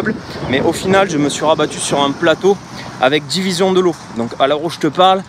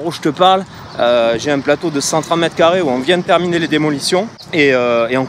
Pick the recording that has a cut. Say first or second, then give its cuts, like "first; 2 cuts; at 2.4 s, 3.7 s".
second; 1 cut; at 4.4 s